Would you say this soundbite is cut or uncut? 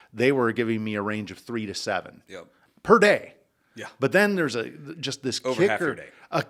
uncut